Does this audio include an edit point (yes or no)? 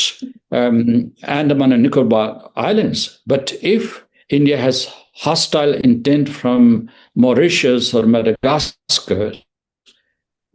no